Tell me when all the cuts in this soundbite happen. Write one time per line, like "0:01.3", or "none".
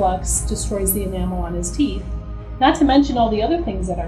none